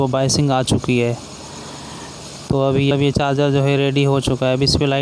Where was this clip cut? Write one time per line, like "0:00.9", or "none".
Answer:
0:02.9